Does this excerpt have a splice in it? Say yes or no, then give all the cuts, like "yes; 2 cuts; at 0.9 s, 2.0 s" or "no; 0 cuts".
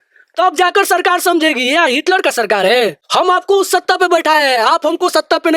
yes; 1 cut; at 3.0 s